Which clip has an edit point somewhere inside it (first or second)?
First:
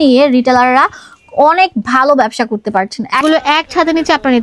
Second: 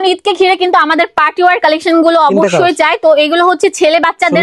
first